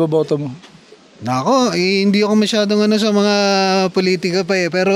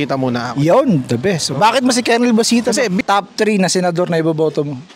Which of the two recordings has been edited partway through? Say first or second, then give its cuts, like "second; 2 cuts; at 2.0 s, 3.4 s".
second; 1 cut; at 3.0 s